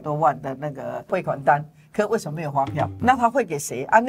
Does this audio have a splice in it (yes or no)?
yes